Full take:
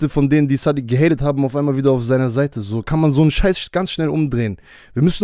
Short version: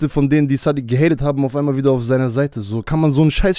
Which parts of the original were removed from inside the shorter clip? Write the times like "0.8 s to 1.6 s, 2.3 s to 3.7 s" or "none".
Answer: none